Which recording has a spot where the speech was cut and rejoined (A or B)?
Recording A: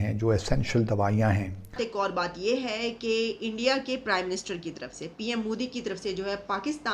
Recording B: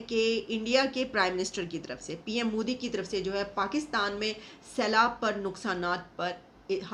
A